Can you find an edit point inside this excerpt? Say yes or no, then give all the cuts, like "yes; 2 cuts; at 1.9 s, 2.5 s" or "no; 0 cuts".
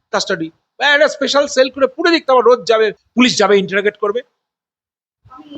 no; 0 cuts